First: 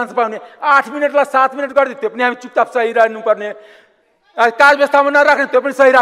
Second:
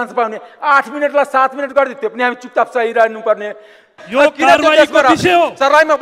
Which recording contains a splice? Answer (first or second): second